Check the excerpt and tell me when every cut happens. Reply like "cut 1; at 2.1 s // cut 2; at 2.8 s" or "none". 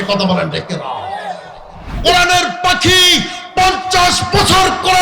cut 1; at 1.8 s